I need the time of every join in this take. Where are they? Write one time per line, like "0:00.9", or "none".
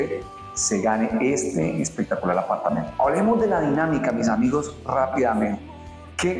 none